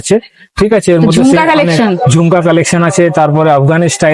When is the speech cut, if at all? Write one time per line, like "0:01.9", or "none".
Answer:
none